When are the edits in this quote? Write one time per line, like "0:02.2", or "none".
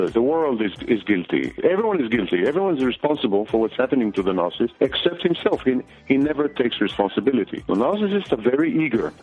0:01.6
0:04.7
0:07.6

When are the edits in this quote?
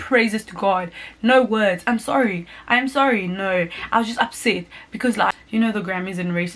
0:05.3

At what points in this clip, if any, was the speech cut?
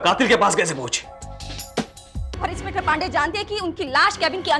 0:02.1

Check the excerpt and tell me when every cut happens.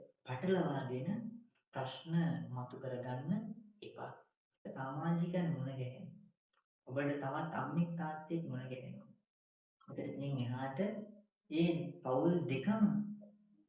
0:04.7

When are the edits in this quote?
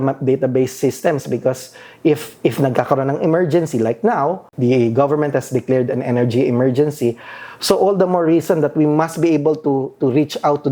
0:04.5

